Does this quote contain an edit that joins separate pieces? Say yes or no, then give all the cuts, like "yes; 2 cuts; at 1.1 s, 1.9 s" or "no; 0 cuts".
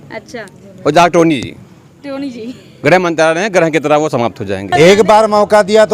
yes; 1 cut; at 4.6 s